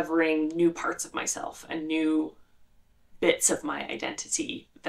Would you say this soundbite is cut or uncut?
uncut